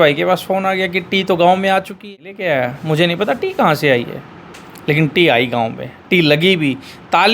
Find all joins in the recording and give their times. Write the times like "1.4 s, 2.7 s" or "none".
2.0 s